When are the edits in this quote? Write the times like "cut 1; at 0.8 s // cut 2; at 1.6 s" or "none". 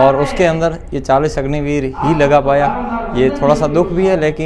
none